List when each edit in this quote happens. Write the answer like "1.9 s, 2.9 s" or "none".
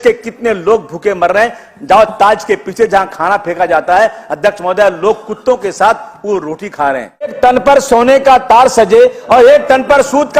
7.3 s